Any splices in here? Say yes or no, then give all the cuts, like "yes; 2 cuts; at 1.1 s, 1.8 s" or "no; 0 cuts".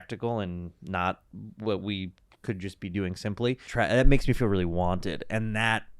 yes; 1 cut; at 3.6 s